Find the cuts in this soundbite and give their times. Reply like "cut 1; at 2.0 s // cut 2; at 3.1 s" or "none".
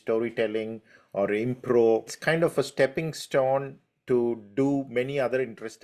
cut 1; at 2.1 s

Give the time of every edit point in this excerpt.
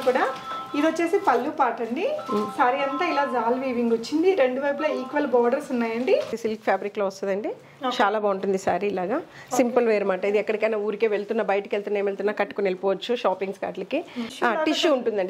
cut 1; at 6.3 s // cut 2; at 14.2 s

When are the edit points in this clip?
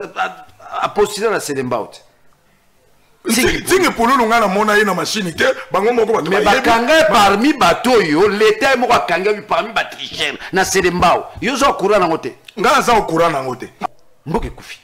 cut 1; at 13.8 s

